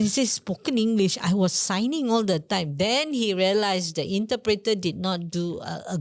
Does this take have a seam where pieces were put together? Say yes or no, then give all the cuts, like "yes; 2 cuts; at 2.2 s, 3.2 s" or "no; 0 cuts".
no; 0 cuts